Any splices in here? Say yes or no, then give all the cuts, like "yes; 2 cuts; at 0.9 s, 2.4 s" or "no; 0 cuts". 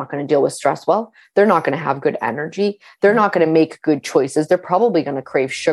no; 0 cuts